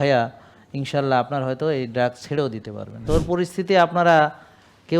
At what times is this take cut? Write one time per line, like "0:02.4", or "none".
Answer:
0:03.0